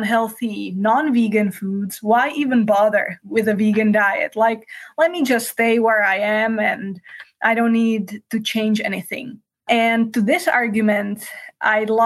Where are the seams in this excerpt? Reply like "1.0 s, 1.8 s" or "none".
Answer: 3.2 s, 9.6 s